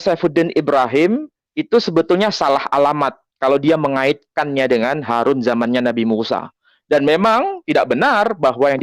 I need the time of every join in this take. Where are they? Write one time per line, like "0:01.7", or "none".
none